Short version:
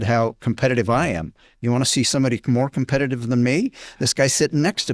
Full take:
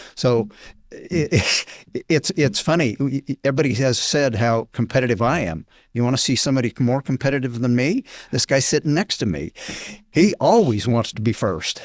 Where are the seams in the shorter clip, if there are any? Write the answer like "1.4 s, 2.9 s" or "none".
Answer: none